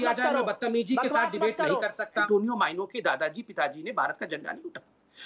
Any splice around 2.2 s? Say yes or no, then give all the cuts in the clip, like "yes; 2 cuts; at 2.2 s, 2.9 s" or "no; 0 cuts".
yes; 1 cut; at 2.2 s